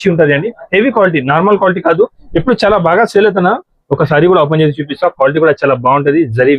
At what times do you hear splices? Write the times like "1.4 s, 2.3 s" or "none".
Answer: none